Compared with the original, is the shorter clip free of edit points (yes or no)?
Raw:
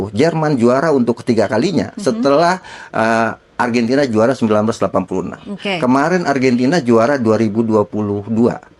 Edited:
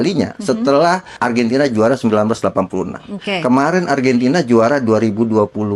no